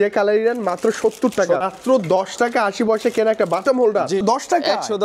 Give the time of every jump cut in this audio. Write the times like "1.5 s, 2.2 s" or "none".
1.6 s, 4.2 s